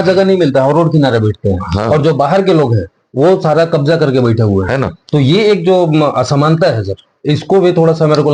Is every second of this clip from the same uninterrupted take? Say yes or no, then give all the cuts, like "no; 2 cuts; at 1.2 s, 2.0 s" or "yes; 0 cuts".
yes; 0 cuts